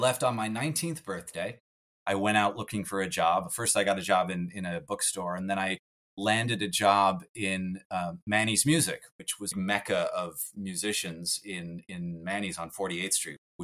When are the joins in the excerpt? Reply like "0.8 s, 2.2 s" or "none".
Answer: 1.8 s, 9.5 s